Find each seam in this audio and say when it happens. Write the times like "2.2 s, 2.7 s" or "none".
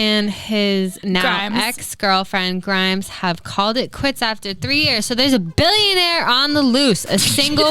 1.0 s